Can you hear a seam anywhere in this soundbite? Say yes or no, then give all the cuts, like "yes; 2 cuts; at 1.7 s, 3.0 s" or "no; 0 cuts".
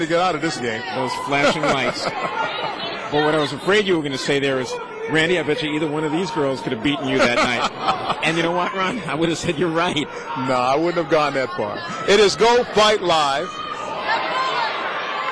no; 0 cuts